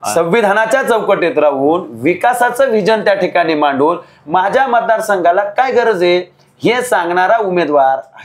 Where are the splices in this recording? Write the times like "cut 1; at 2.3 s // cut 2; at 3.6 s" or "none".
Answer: none

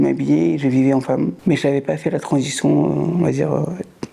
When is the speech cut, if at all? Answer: cut 1; at 1.4 s

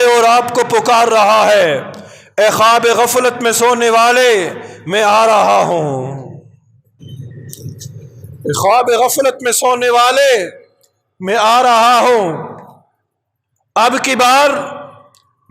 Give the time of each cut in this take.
cut 1; at 7.0 s

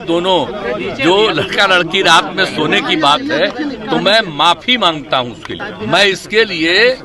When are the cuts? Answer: cut 1; at 5.7 s

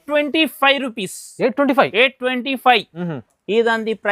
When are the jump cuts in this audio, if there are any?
cut 1; at 3.0 s

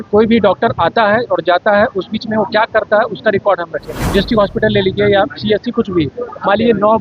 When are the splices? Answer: cut 1; at 3.9 s

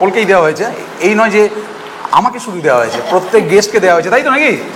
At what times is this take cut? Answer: none

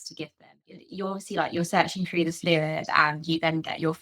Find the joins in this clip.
cut 1; at 0.9 s

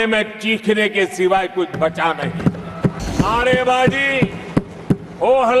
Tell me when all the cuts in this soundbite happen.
cut 1; at 3.0 s

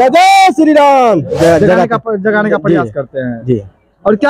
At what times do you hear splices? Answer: cut 1; at 1.3 s

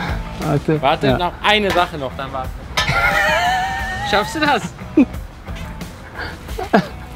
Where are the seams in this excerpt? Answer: none

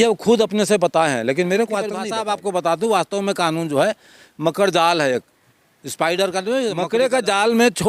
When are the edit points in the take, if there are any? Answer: cut 1; at 2.0 s // cut 2; at 6.8 s

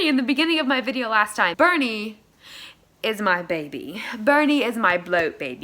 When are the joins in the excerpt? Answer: cut 1; at 1.5 s

